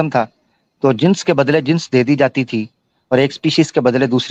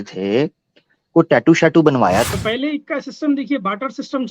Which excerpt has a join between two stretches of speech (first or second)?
second